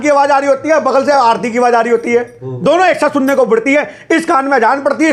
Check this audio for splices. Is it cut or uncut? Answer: uncut